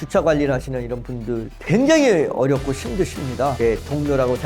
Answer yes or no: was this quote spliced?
yes